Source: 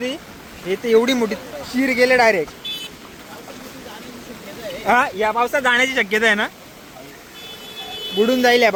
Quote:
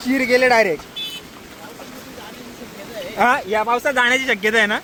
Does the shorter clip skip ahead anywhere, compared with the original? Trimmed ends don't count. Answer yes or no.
no